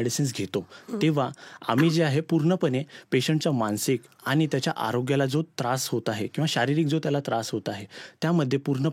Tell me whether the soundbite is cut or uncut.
uncut